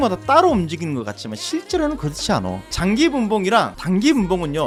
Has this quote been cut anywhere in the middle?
no; 0 cuts

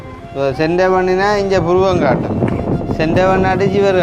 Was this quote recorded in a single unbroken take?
yes; 0 cuts

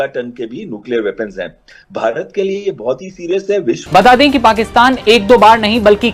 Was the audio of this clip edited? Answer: yes; 1 cut; at 3.8 s

